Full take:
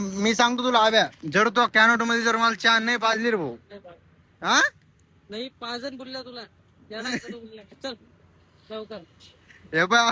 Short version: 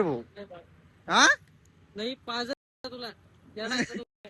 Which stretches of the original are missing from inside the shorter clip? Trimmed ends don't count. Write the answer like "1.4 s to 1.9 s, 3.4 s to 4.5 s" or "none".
none

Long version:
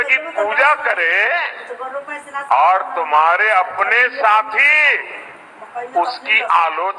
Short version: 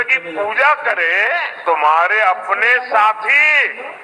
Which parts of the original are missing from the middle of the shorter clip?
1.6 s to 2.9 s

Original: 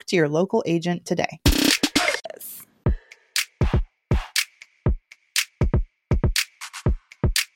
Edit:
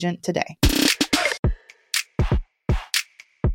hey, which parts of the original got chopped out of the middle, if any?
2.2 s to 2.8 s

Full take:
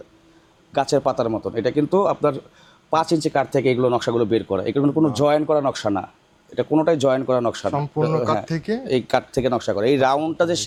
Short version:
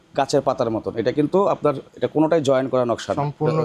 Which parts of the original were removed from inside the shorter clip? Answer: 2.5 s to 6.5 s

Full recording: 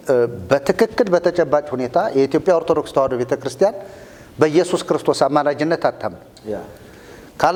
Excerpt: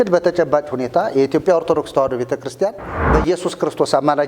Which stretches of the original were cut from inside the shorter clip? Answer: 3.9 s to 4.2 s

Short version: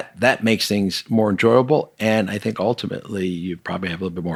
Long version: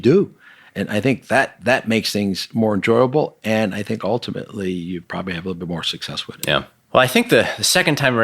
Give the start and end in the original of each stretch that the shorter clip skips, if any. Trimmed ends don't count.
none

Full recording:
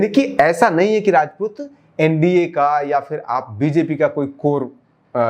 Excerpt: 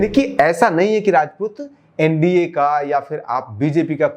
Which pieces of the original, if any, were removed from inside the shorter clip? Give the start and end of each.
none

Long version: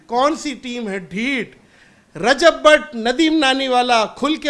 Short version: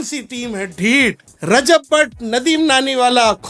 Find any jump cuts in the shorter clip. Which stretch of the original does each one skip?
1.6 s to 2.0 s

